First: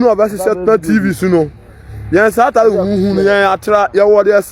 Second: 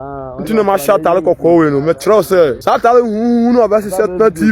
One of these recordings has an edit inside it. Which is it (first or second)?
second